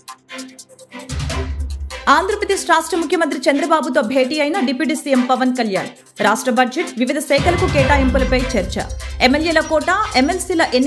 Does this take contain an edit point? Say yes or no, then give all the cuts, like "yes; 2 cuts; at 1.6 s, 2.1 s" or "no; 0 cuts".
no; 0 cuts